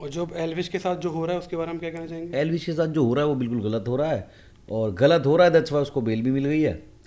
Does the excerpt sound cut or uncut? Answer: uncut